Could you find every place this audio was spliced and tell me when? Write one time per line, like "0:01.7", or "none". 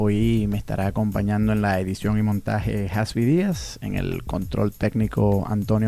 none